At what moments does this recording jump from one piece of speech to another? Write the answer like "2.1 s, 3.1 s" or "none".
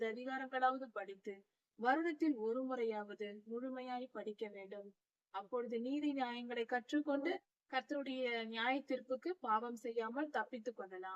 7.6 s